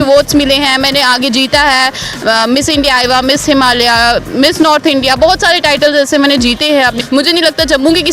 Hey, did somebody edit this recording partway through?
yes; 1 cut; at 7.0 s

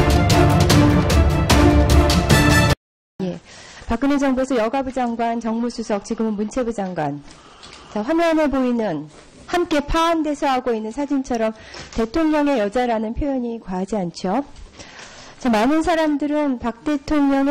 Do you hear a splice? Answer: yes; 1 cut; at 3.1 s

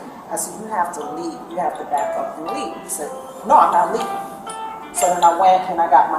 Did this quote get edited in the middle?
no; 0 cuts

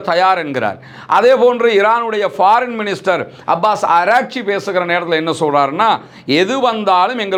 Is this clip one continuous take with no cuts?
yes; 0 cuts

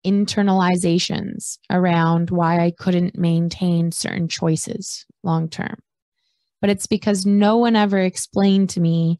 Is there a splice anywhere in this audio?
no; 0 cuts

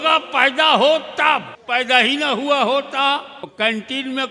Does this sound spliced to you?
yes; 2 cuts; at 1.6 s, 3.5 s

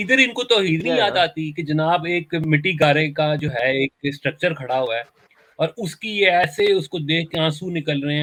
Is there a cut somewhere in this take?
no; 0 cuts

